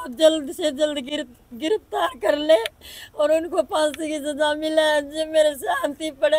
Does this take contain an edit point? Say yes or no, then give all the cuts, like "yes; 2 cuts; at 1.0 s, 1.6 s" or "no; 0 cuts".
no; 0 cuts